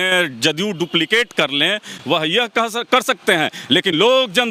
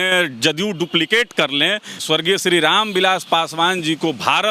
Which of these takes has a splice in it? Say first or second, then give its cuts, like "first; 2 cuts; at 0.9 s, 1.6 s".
second; 1 cut; at 2.0 s